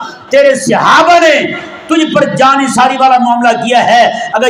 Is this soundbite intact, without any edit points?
yes; 0 cuts

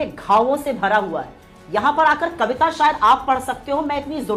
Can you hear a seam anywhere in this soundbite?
no; 0 cuts

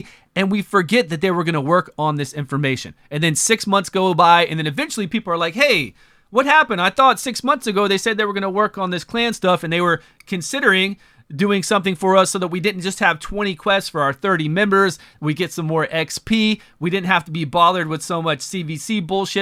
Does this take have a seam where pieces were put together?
no; 0 cuts

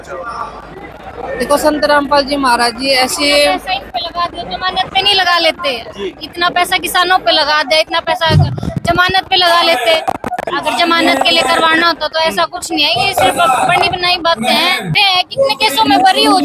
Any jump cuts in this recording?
yes; 1 cut; at 14.9 s

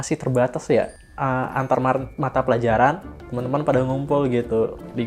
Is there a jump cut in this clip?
no; 0 cuts

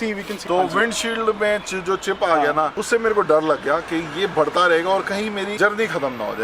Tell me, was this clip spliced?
yes; 1 cut; at 5.5 s

